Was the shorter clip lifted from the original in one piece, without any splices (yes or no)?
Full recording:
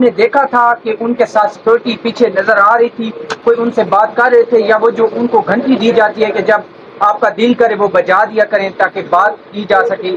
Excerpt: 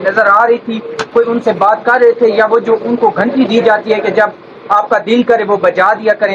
yes